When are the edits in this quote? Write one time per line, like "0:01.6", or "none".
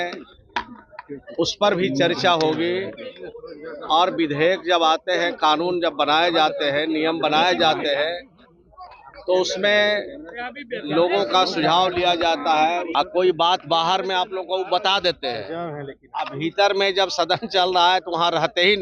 0:12.9

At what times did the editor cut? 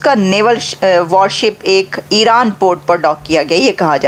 none

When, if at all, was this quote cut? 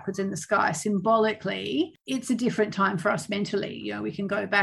0:02.0

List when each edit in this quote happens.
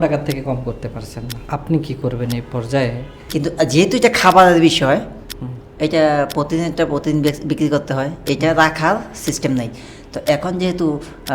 0:01.3
0:03.2

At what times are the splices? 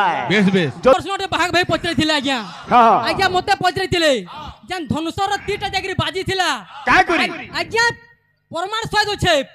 0:01.0

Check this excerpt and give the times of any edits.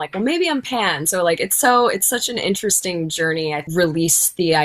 0:03.6

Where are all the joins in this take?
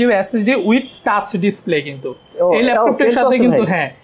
none

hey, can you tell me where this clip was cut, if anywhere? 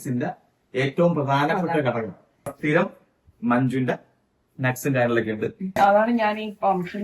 0:02.5
0:05.8

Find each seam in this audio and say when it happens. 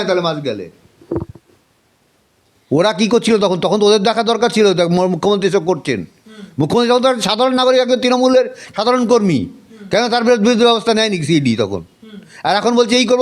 none

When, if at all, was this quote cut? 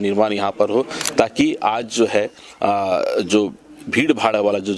none

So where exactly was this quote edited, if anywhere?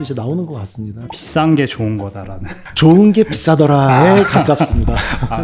0:01.1

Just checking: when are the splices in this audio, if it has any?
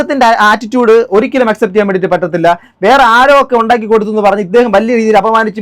none

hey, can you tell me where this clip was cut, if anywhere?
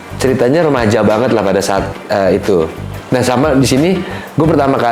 0:02.9

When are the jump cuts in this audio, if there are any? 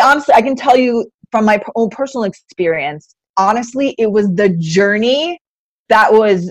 0:03.3

